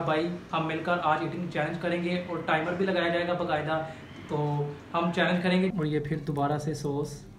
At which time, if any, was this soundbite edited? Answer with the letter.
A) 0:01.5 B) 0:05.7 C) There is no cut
B